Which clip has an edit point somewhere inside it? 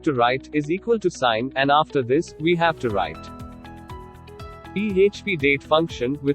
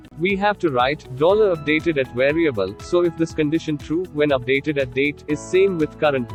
first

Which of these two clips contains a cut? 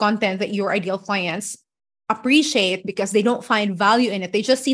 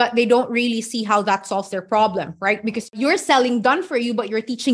second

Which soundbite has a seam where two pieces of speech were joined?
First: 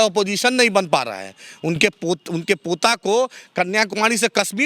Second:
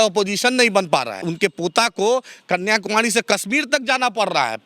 second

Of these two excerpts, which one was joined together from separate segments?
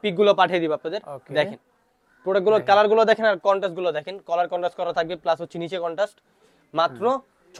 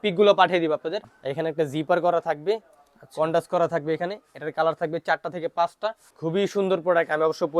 second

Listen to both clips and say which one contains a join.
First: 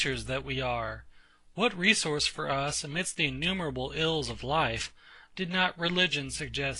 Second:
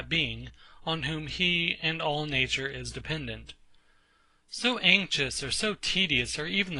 second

